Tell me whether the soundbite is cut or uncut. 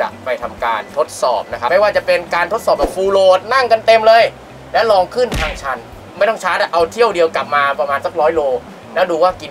cut